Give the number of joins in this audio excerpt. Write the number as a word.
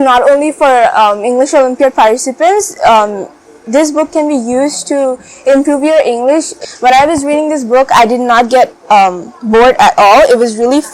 one